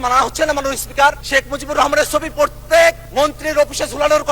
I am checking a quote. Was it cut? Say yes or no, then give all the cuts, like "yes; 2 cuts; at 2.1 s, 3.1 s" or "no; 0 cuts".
yes; 2 cuts; at 1.2 s, 3.0 s